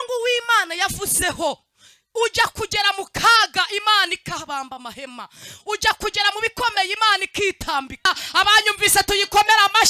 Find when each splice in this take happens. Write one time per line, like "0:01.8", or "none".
0:08.1